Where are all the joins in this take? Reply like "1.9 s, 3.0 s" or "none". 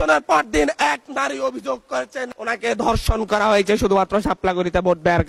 none

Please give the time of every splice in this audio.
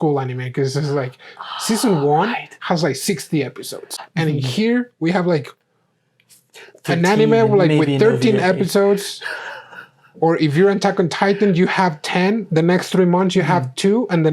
4.0 s

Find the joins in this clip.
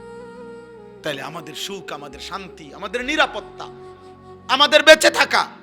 1.0 s

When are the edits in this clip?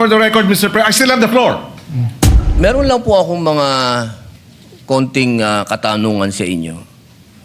2.4 s

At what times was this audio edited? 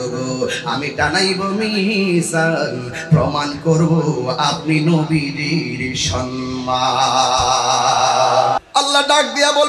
8.6 s

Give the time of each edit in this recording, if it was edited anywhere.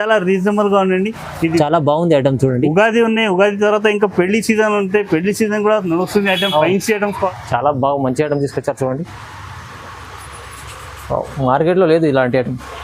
1.6 s, 7.3 s

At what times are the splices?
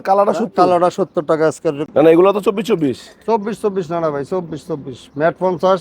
1.8 s

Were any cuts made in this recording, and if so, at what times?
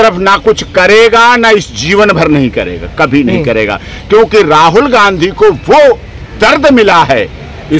none

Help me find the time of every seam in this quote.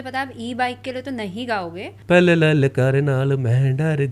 1.9 s

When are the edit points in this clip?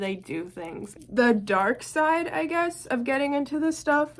0.9 s

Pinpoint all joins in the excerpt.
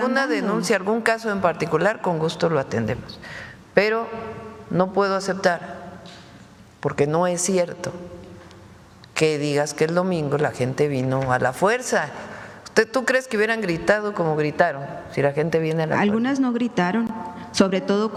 none

